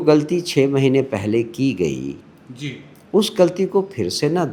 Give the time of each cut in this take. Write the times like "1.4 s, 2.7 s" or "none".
none